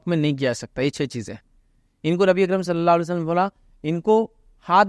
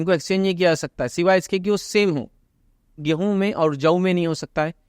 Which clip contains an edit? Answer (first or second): second